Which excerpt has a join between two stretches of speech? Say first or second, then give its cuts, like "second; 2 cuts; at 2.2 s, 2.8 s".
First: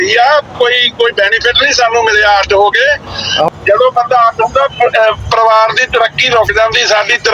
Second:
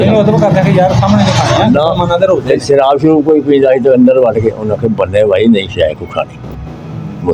first; 1 cut; at 3.5 s